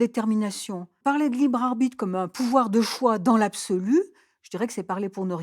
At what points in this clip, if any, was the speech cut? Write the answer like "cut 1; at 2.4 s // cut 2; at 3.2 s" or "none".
cut 1; at 0.9 s